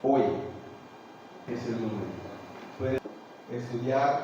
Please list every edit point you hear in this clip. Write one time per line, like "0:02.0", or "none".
0:03.0

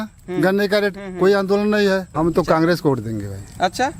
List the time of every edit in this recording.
0:02.1

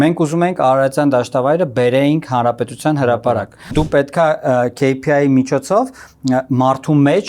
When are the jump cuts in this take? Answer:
0:03.7

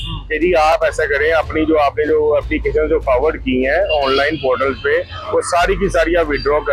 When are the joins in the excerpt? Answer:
none

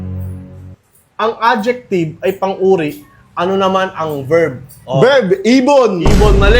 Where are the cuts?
none

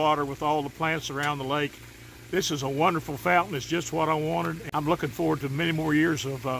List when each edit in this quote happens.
0:04.6

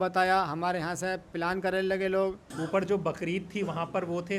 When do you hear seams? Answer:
0:02.5

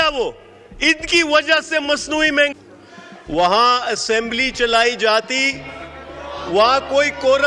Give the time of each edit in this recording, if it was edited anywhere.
0:02.5

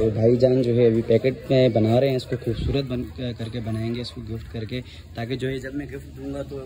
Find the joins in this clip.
none

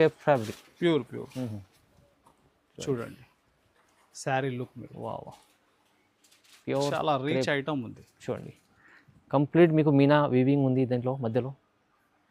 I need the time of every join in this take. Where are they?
none

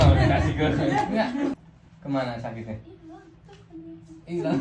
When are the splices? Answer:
0:01.5

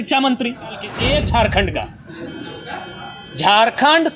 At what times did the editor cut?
0:00.9

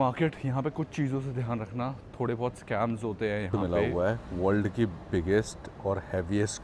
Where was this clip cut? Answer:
0:03.5

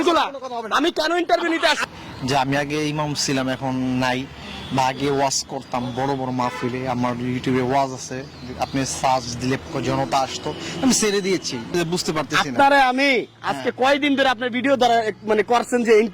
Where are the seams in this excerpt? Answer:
0:01.8
0:09.6
0:11.7

